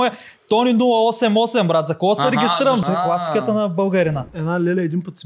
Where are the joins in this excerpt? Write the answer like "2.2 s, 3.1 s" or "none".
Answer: 2.8 s, 4.3 s